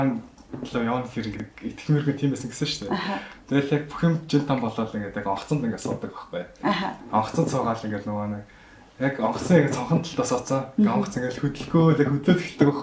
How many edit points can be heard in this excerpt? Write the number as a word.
one